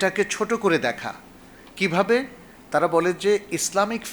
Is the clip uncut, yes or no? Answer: yes